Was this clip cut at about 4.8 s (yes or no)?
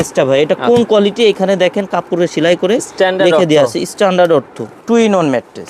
yes